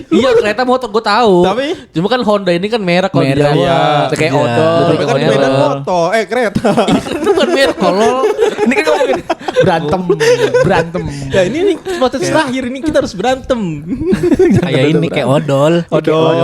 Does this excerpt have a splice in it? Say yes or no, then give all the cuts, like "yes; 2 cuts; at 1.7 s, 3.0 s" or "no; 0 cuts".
no; 0 cuts